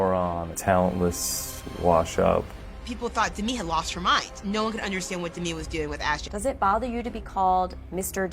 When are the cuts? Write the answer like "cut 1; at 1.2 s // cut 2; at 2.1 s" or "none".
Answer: cut 1; at 2.5 s // cut 2; at 6.2 s